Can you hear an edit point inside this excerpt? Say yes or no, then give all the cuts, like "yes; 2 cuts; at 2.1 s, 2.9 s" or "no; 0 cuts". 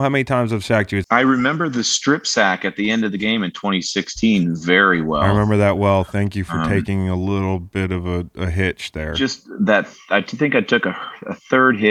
yes; 1 cut; at 1.0 s